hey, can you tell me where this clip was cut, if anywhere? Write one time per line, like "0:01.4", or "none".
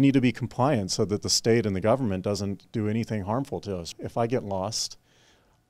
0:03.9